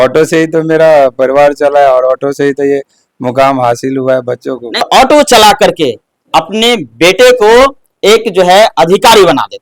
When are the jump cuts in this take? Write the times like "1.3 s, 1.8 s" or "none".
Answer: 4.8 s